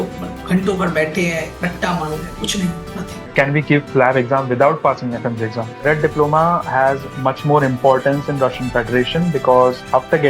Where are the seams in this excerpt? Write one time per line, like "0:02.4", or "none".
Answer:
0:03.3
0:05.8